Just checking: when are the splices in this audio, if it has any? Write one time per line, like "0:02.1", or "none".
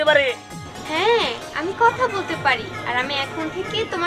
none